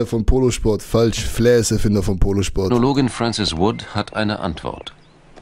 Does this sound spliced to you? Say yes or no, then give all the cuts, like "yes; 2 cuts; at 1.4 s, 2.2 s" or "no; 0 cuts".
no; 0 cuts